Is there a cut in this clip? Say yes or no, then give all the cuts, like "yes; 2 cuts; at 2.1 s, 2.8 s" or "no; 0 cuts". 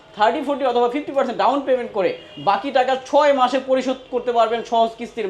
no; 0 cuts